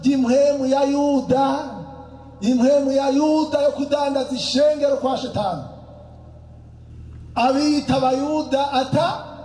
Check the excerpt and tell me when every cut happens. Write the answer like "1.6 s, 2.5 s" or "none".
6.9 s